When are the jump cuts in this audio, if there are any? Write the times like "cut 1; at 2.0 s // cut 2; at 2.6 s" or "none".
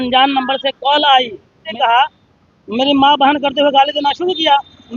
cut 1; at 1.7 s